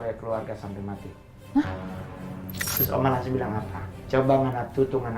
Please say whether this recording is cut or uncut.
cut